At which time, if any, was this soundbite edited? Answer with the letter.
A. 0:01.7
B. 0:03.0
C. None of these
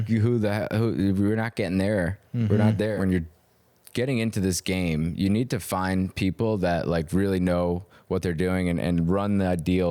B